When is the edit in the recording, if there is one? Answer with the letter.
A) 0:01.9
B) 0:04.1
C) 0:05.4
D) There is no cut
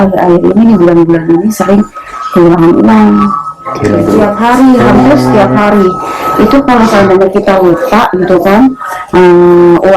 B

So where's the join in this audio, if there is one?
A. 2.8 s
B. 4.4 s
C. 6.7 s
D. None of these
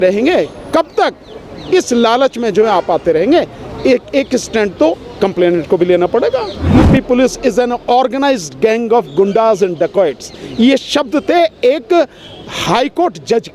C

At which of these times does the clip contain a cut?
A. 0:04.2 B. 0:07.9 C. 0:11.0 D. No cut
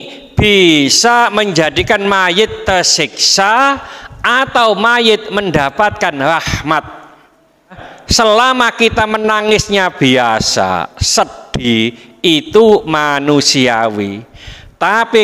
B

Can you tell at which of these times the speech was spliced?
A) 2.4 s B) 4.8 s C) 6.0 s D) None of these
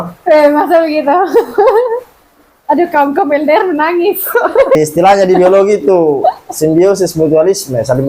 B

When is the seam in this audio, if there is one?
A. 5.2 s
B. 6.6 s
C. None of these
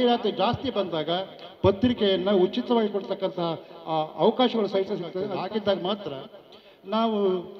A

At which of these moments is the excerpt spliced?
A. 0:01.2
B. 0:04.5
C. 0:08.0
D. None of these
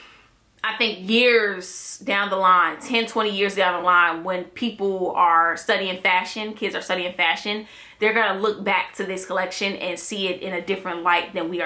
D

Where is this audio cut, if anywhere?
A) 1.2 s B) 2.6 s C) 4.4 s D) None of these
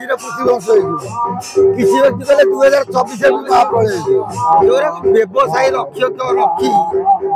C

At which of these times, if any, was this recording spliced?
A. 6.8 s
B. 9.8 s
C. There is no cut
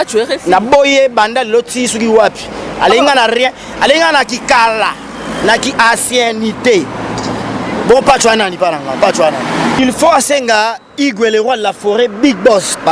B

